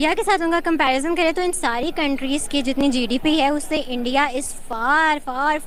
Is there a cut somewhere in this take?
no; 0 cuts

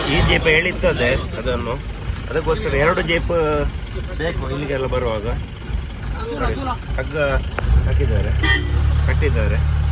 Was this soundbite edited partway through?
no; 0 cuts

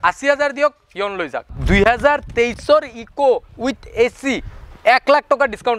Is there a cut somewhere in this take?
yes; 1 cut; at 1.5 s

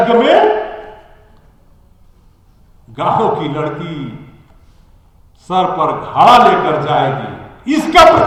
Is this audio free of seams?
yes; 0 cuts

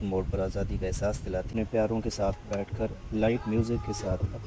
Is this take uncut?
no; 1 cut; at 1.5 s

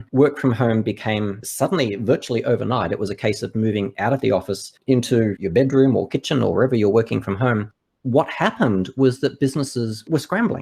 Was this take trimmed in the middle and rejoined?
no; 0 cuts

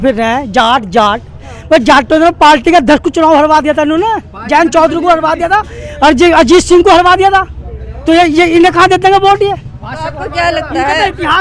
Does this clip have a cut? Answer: no; 0 cuts

